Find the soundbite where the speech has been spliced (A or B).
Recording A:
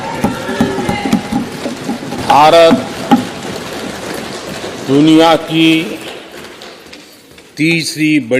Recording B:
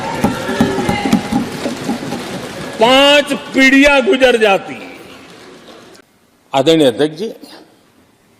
A